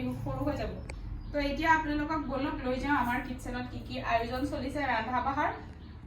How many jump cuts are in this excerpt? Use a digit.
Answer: 0